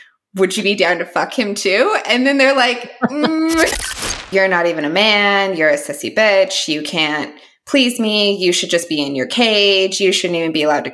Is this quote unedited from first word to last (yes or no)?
no